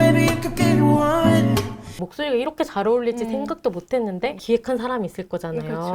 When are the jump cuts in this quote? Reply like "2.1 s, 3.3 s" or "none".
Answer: 1.9 s, 4.4 s